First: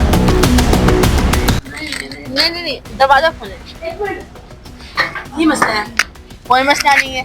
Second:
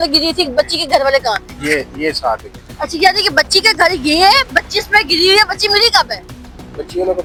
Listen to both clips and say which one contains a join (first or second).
first